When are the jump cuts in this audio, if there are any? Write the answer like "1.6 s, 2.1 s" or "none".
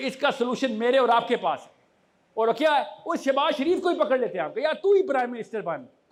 none